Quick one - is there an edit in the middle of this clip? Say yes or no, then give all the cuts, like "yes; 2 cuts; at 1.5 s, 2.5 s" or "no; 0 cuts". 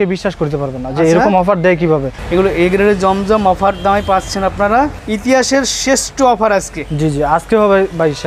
yes; 2 cuts; at 2.2 s, 5.0 s